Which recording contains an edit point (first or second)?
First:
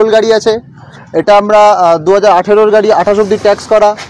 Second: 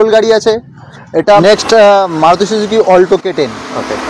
second